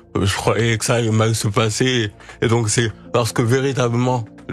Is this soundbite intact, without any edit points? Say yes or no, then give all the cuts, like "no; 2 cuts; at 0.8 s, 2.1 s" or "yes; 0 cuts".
yes; 0 cuts